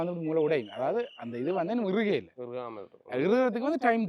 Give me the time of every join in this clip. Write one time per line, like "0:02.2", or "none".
none